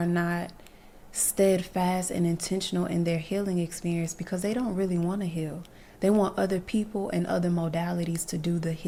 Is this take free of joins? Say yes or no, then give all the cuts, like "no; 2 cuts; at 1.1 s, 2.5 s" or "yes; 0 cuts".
yes; 0 cuts